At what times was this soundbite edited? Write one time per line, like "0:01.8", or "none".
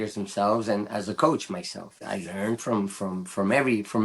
0:02.0